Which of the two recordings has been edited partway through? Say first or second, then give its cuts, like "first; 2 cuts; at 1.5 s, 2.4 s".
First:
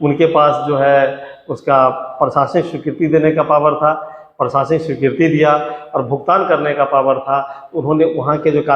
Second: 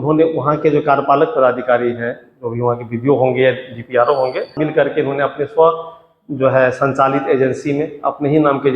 second; 1 cut; at 4.5 s